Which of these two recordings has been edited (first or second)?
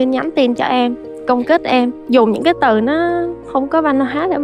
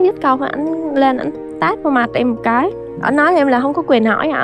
first